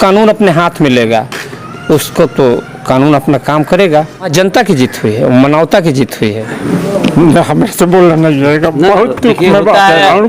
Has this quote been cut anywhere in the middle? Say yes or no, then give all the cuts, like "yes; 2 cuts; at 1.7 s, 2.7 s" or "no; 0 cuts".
yes; 2 cuts; at 4.3 s, 6.5 s